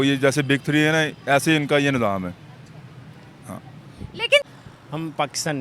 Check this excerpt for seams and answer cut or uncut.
cut